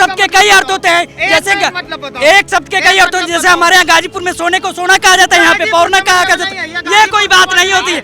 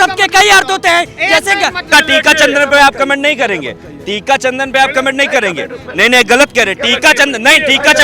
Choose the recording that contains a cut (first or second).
second